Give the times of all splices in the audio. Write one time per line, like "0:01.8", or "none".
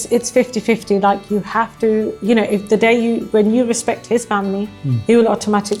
none